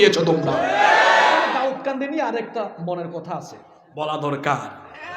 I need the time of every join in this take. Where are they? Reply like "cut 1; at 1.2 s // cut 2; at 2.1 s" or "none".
cut 1; at 1.5 s